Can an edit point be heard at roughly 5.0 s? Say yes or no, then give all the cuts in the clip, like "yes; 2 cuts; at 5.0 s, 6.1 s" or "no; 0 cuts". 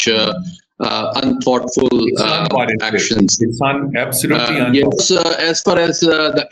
yes; 1 cut; at 5.0 s